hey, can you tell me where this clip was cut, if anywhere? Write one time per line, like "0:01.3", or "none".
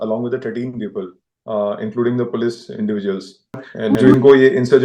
0:03.9